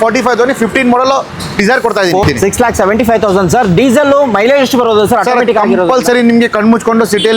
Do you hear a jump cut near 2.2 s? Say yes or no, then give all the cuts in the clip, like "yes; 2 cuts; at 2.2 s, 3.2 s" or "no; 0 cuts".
yes; 1 cut; at 2.2 s